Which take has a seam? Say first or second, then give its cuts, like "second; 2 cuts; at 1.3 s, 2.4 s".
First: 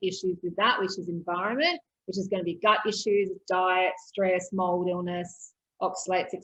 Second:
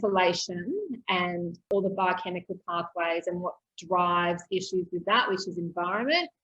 second; 1 cut; at 1.6 s